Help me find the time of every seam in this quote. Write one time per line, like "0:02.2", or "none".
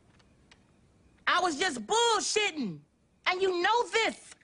none